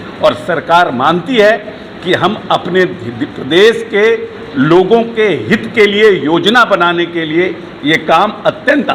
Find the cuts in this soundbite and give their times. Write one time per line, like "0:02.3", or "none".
none